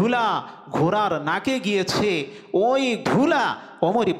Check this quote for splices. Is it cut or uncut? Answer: cut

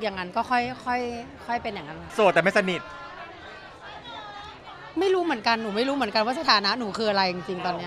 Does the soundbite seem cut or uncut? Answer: cut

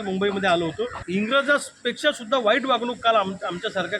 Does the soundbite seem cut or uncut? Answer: cut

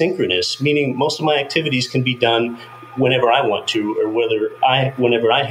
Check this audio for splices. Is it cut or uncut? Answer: uncut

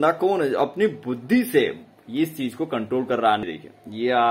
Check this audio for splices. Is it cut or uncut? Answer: cut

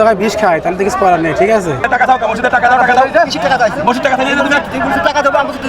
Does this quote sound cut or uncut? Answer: cut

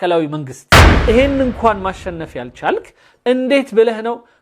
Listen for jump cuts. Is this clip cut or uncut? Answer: cut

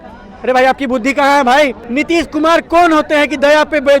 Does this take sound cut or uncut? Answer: cut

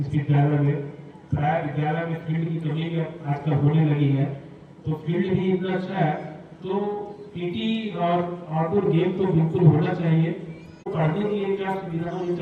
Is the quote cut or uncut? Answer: cut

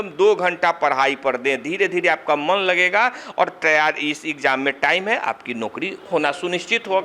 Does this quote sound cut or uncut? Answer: cut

